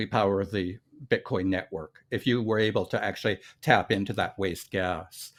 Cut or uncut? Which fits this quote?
uncut